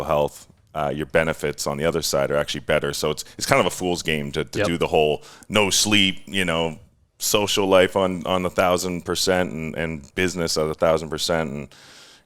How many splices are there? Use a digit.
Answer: 0